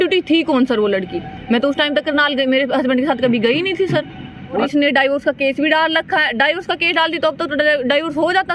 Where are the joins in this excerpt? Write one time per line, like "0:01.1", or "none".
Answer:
0:04.7